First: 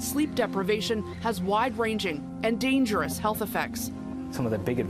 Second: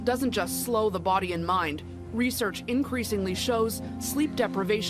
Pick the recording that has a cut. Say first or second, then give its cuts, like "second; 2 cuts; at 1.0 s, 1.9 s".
first; 1 cut; at 2.9 s